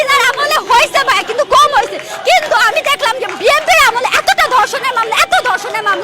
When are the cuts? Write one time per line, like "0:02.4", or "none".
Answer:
none